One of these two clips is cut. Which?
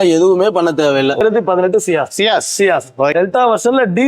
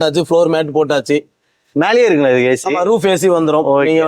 first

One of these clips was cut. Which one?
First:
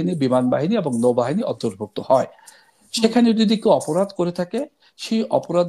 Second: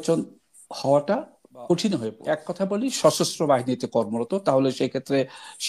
second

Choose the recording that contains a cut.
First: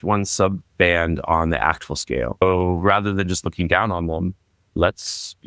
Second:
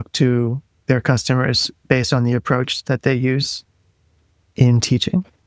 first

